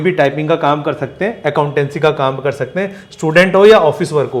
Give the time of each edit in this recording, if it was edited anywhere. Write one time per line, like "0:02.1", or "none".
none